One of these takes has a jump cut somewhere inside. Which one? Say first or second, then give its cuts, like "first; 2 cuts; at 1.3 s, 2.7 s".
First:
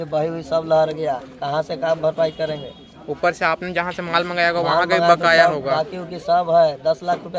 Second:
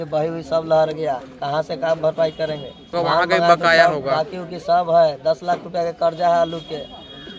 second; 1 cut; at 2.9 s